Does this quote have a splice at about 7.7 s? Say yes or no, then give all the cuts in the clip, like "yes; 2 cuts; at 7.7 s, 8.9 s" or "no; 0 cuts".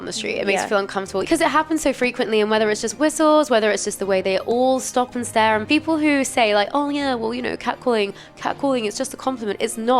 no; 2 cuts; at 1.2 s, 5.6 s